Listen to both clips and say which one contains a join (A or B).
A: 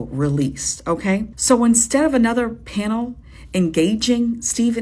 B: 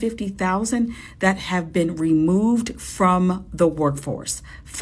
A